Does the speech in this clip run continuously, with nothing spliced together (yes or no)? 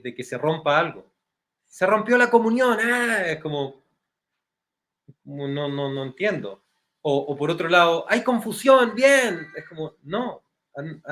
yes